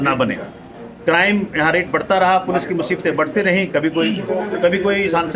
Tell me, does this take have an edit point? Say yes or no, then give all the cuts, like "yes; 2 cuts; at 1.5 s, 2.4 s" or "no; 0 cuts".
no; 0 cuts